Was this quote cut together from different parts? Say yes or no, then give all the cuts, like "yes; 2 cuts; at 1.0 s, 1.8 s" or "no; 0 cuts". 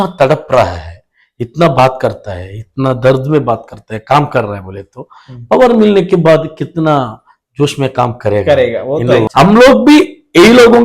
yes; 1 cut; at 9.3 s